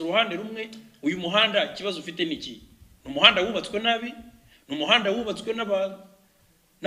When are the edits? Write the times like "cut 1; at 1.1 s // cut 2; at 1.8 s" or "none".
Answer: none